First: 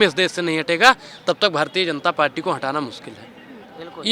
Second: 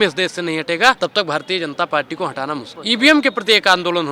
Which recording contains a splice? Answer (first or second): second